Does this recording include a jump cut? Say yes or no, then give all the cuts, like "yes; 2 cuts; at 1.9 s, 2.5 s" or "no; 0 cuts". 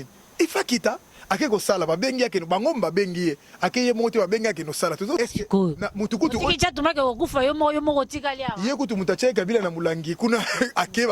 yes; 1 cut; at 5.2 s